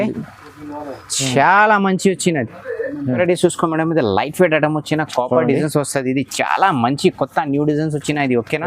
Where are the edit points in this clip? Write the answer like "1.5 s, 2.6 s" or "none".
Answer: 3.2 s